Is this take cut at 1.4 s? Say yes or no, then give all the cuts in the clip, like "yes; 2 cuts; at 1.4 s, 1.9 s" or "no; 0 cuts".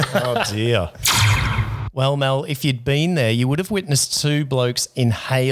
yes; 1 cut; at 1.4 s